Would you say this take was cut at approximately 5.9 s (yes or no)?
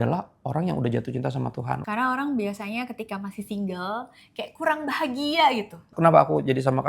yes